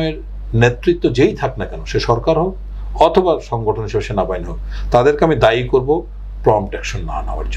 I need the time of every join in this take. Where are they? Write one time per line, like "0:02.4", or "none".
none